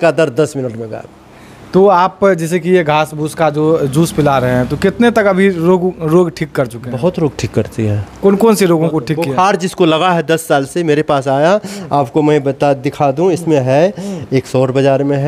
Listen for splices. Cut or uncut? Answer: uncut